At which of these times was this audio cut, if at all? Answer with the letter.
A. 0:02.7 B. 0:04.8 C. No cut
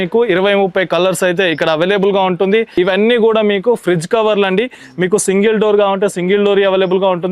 A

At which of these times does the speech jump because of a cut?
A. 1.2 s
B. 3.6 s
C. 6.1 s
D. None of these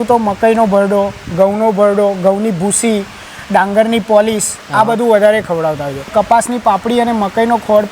C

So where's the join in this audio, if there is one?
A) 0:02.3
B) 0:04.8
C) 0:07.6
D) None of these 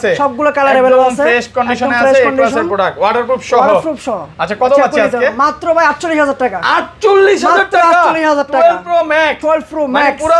D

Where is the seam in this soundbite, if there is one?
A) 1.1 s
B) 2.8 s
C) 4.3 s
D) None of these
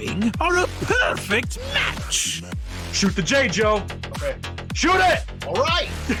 D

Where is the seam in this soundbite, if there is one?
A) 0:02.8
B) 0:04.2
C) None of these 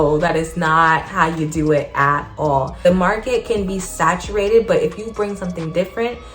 A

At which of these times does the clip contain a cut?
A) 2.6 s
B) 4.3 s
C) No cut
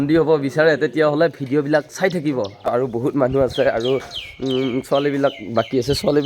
A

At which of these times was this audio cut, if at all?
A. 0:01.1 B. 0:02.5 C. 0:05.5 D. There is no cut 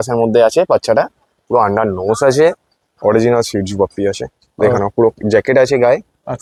D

